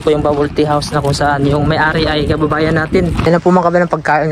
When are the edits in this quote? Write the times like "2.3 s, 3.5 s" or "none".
3.3 s